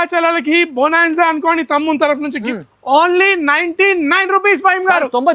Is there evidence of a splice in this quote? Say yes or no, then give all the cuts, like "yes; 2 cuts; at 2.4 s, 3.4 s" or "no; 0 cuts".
yes; 1 cut; at 2.5 s